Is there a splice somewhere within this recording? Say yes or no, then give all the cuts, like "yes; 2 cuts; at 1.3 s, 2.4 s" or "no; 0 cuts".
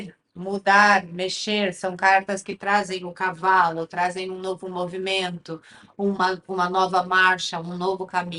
no; 0 cuts